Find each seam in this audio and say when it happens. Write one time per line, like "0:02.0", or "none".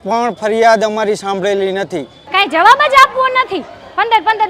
0:02.2